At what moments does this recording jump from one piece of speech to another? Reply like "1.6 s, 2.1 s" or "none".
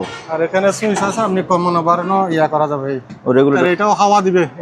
3.6 s